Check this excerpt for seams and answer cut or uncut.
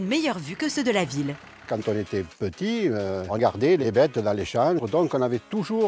cut